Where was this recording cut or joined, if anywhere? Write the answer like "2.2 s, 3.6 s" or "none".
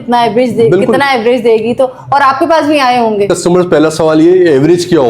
3.3 s